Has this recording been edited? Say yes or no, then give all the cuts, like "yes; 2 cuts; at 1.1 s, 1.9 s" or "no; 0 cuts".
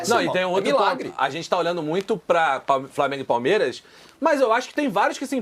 no; 0 cuts